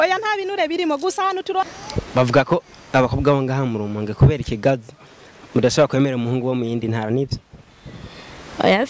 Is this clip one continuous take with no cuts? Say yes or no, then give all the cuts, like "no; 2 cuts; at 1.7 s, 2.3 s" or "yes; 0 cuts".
no; 1 cut; at 1.7 s